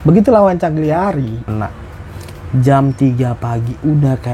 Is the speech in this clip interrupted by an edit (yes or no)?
yes